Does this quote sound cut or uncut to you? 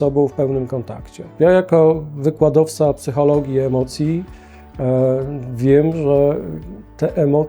uncut